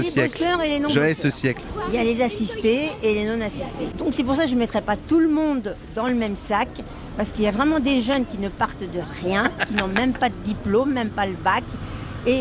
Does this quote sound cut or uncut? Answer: uncut